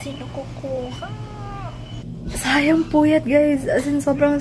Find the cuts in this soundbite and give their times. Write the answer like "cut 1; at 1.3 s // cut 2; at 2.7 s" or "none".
cut 1; at 1.8 s